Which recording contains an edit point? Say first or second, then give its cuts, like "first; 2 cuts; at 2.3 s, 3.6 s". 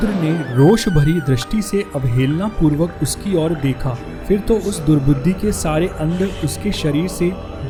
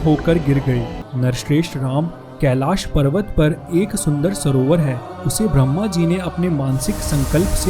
second; 1 cut; at 1.0 s